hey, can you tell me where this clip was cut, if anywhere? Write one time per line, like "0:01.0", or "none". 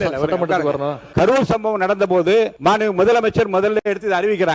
0:01.0
0:02.5